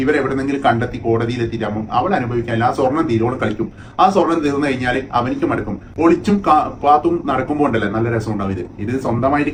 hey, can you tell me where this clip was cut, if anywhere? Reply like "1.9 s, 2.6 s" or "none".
none